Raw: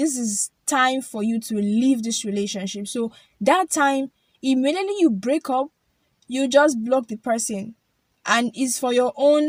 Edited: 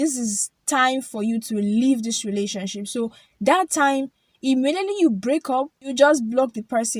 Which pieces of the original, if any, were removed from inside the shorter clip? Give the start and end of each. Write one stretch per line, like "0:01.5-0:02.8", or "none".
0:05.8-0:06.4